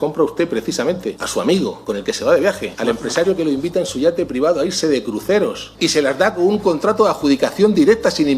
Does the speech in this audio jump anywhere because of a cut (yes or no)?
yes